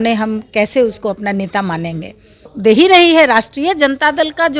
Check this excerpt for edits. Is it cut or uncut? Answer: cut